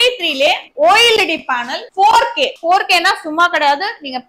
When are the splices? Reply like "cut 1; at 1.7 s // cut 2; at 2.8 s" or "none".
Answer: cut 1; at 2.6 s